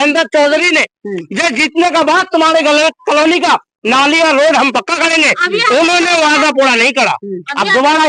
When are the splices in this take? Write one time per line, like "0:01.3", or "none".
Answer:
none